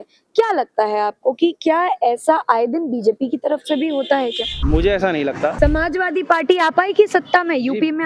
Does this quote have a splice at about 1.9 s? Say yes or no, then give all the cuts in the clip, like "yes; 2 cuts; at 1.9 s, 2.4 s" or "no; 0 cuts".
no; 2 cuts; at 4.5 s, 5.5 s